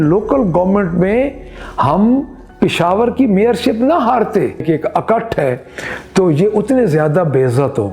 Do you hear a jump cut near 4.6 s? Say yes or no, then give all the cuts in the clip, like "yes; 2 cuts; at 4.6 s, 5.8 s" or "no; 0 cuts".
yes; 1 cut; at 4.6 s